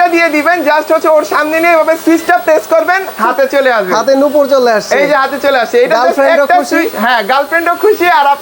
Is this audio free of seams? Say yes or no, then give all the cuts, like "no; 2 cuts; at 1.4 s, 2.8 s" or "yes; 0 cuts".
yes; 0 cuts